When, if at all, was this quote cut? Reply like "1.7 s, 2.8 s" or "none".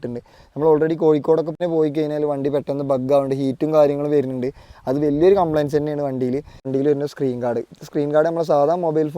1.6 s, 6.7 s